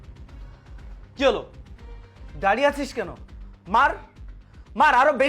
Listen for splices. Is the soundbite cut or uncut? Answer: uncut